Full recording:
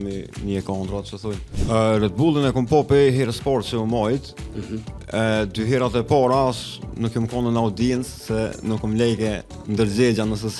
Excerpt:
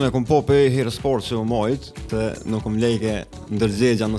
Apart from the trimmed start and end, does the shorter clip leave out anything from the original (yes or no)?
yes